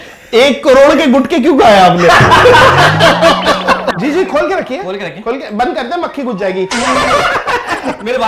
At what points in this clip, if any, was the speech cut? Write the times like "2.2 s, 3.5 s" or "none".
3.9 s

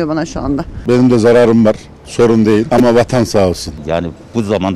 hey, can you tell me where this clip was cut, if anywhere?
0.8 s, 2.7 s, 3.7 s

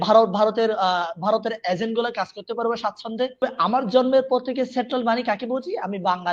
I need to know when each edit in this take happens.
3.4 s

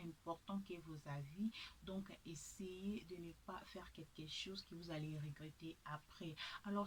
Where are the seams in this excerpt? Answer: none

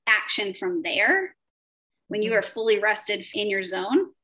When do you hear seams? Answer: 3.3 s

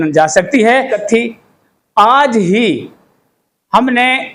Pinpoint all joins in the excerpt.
1.0 s

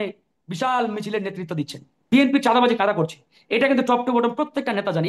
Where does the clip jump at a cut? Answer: 2.1 s

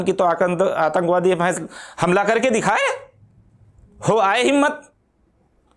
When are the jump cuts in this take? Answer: none

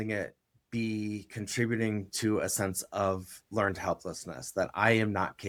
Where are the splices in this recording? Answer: none

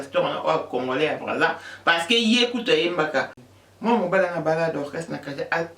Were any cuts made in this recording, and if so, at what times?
3.4 s

